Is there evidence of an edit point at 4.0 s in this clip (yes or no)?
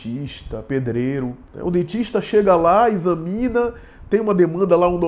no